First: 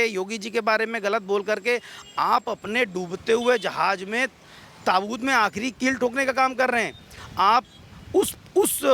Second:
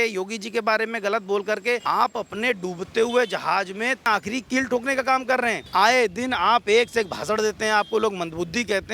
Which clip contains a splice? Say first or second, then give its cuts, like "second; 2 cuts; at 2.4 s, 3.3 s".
second; 3 cuts; at 1.8 s, 4.0 s, 5.6 s